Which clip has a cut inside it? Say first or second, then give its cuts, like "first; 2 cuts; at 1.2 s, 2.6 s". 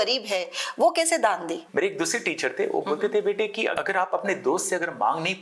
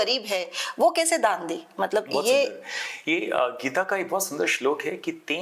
first; 2 cuts; at 1.6 s, 3.7 s